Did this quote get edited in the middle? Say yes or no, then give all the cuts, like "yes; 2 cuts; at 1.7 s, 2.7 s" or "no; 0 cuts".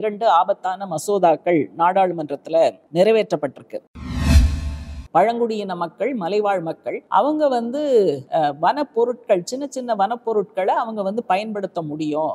yes; 4 cuts; at 2.8 s, 4.4 s, 6.9 s, 8.2 s